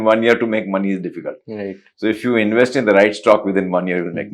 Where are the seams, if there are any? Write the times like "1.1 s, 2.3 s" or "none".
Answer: none